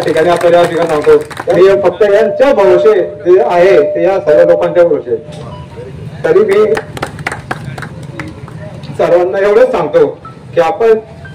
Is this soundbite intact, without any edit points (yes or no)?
no